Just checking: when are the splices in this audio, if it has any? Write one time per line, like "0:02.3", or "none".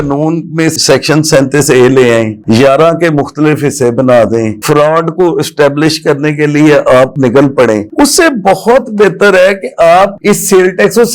none